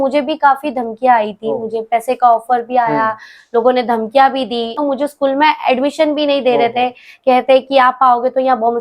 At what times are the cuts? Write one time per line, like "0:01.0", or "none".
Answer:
0:04.8